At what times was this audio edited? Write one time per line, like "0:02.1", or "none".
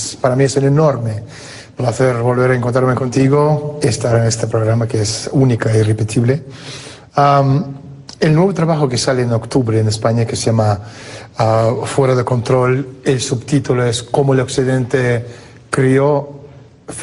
0:12.2